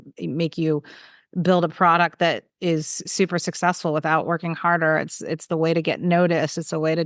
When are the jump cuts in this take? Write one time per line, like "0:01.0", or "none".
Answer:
none